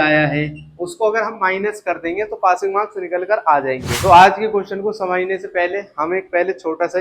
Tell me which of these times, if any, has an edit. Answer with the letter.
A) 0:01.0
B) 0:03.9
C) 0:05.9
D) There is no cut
B